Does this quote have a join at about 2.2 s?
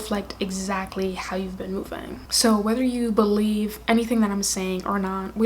yes; 1 cut; at 2.2 s

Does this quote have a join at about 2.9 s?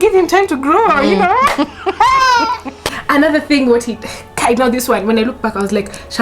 yes; 1 cut; at 2.9 s

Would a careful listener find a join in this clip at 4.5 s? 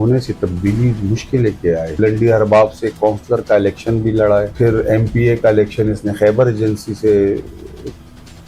yes; 2 cuts; at 2.0 s, 4.5 s

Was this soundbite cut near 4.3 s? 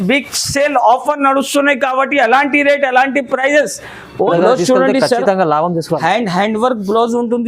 yes; 1 cut; at 4.3 s

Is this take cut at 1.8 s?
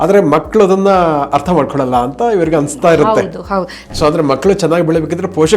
no; 1 cut; at 3.8 s

